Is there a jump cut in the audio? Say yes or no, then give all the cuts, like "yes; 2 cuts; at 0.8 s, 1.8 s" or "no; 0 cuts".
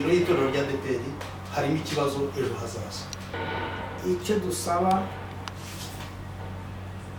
yes; 1 cut; at 3.3 s